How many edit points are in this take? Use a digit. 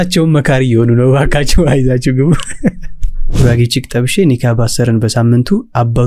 1